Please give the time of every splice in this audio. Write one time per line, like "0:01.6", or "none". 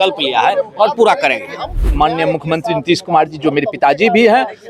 0:01.8